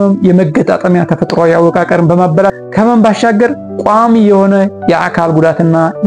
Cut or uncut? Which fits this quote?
uncut